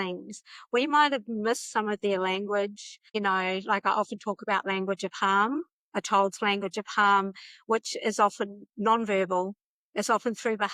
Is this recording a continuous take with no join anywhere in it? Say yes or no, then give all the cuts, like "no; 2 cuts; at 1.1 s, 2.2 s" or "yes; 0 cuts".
yes; 0 cuts